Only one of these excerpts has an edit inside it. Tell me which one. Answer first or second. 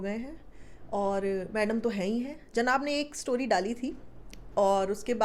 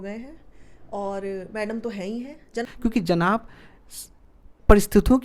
second